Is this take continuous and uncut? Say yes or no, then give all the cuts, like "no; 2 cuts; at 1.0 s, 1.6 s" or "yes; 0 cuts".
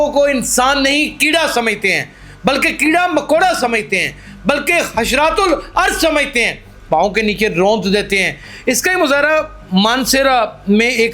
yes; 0 cuts